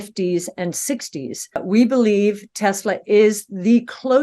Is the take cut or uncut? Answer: cut